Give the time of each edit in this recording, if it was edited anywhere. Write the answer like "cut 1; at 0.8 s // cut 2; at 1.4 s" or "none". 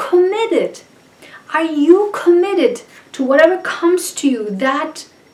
none